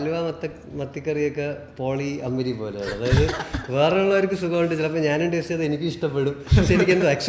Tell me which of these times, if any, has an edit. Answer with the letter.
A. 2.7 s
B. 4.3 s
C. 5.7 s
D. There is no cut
D